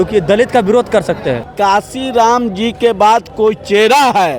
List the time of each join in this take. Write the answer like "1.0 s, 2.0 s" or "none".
1.5 s